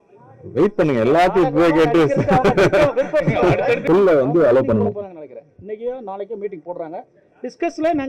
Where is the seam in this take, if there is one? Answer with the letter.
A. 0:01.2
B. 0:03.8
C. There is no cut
B